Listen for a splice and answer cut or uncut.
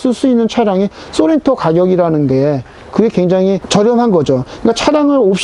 uncut